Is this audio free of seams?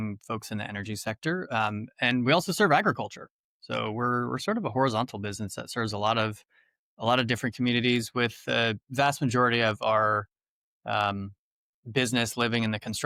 yes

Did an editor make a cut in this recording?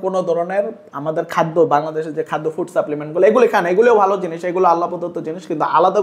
no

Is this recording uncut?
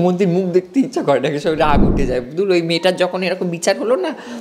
yes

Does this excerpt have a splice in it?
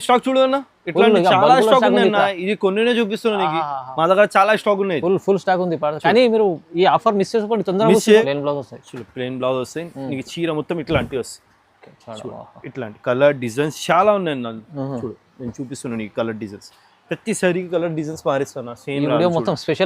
yes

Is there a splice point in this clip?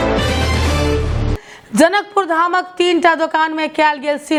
no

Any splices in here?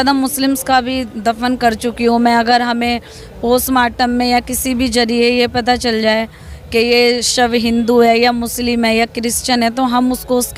no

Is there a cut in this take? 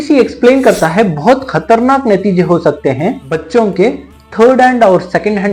no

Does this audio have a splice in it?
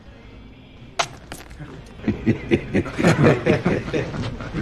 no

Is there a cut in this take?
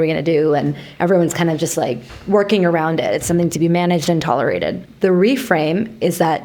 yes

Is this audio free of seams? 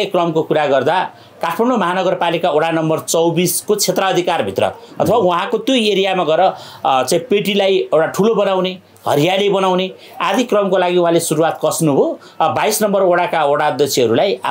yes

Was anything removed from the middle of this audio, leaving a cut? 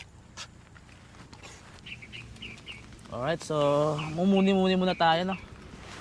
yes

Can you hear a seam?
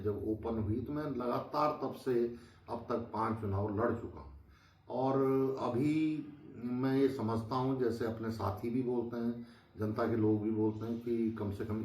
no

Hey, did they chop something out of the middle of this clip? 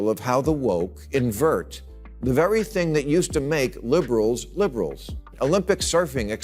yes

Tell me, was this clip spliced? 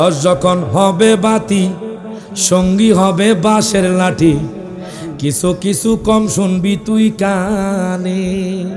no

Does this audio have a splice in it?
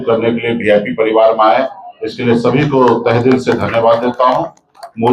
no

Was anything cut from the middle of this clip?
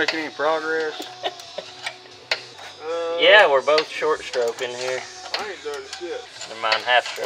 yes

